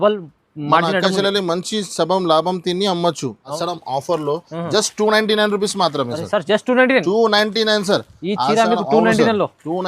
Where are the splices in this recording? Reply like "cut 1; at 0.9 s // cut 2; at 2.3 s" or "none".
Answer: cut 1; at 3.5 s